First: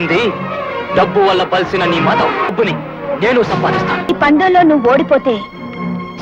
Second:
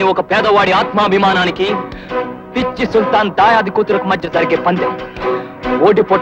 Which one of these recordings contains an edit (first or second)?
first